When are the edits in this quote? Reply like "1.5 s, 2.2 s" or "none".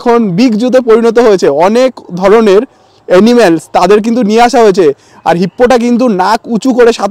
none